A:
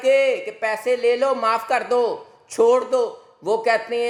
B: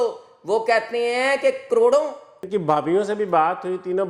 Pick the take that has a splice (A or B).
B